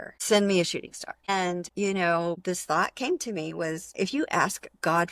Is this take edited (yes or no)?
yes